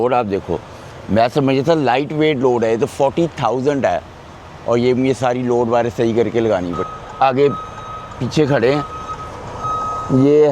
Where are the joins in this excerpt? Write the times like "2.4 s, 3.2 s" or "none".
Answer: 6.8 s